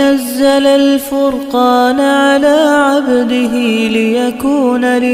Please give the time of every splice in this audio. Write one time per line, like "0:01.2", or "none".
none